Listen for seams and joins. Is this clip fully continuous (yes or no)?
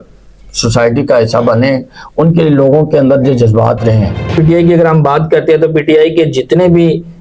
no